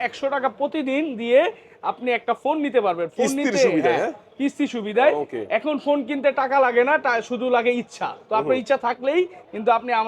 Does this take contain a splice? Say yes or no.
no